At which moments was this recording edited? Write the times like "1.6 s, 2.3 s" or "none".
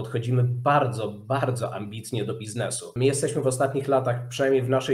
2.9 s